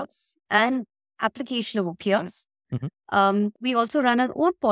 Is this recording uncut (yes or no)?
yes